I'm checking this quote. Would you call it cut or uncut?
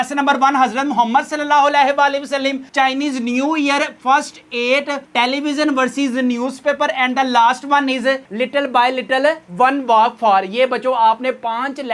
uncut